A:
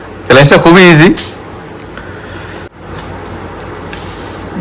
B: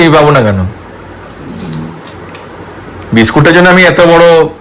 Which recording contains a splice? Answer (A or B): A